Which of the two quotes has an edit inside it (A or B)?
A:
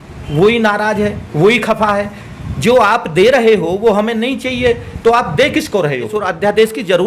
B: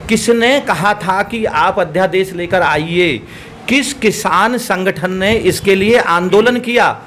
A